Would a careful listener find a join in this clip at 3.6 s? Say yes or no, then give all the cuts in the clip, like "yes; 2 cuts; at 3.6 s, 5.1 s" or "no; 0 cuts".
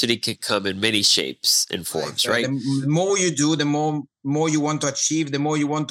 no; 1 cut; at 2.4 s